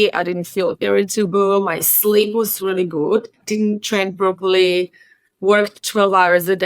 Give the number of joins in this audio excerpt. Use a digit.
1